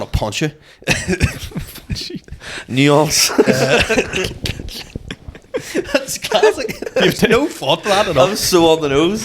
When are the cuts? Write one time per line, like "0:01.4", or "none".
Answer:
none